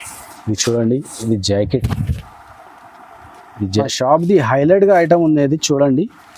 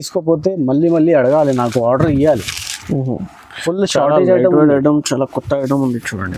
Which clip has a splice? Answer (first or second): first